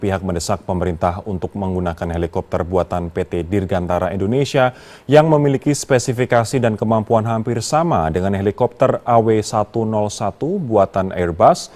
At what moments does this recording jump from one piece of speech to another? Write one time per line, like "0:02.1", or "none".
none